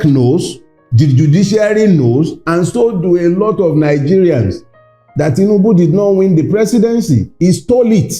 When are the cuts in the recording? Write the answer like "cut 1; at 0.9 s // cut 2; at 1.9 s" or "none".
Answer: none